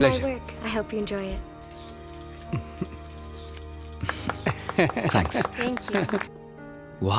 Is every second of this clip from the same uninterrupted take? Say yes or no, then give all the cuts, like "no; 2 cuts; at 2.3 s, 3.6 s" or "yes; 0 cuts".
no; 1 cut; at 6.3 s